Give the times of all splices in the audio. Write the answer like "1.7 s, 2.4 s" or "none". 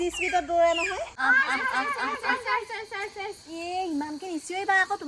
1.1 s